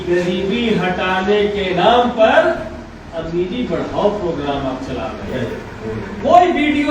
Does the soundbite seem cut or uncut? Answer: cut